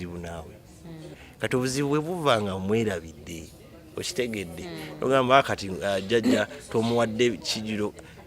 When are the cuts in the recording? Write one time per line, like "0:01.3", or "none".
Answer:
0:01.1